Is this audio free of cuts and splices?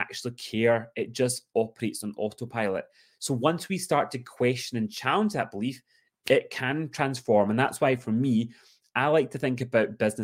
yes; 0 cuts

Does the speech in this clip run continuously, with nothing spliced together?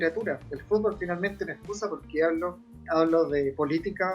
no; 1 cut; at 2.8 s

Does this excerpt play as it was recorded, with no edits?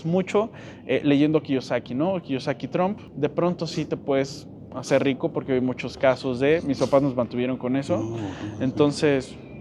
no; 1 cut; at 3.0 s

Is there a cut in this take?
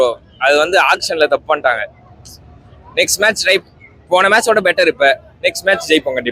no; 0 cuts

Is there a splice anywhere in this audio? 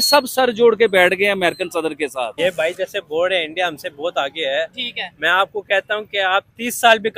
yes; 1 cut; at 2.3 s

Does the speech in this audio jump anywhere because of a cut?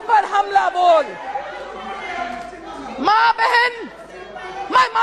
no; 0 cuts

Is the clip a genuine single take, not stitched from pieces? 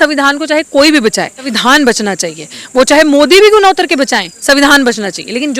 no; 1 cut; at 1.5 s

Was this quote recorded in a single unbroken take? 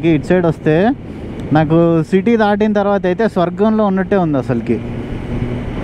yes; 0 cuts

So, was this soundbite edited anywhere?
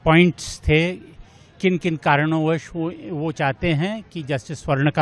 no; 0 cuts

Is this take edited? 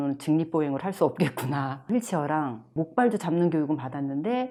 no; 0 cuts

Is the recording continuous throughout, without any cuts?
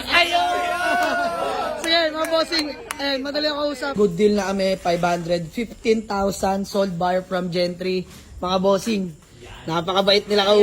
no; 1 cut; at 3.9 s

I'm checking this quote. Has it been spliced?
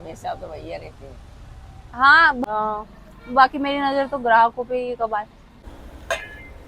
yes; 2 cuts; at 2.4 s, 5.6 s

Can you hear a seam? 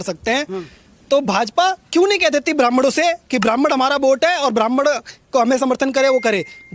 no; 0 cuts

